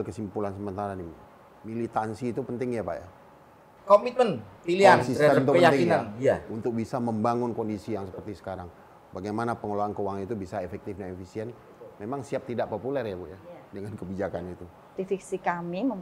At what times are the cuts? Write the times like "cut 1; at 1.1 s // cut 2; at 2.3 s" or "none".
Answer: cut 1; at 15.0 s